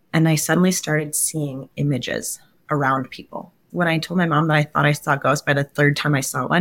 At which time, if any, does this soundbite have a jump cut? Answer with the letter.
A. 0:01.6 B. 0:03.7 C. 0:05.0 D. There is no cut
B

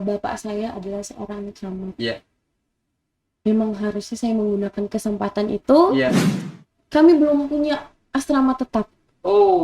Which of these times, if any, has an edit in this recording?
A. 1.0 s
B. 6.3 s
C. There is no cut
B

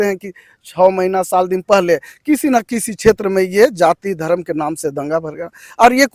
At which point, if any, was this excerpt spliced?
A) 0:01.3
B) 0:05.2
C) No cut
C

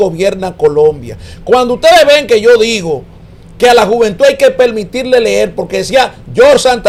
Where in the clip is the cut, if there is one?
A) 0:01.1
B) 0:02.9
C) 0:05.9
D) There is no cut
D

